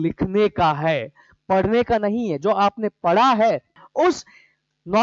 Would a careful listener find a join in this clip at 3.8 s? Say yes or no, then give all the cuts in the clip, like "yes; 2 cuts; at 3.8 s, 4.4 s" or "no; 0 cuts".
yes; 1 cut; at 3.8 s